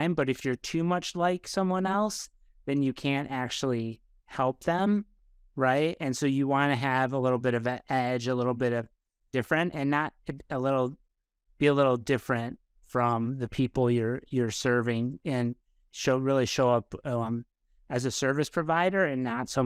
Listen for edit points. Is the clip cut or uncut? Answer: uncut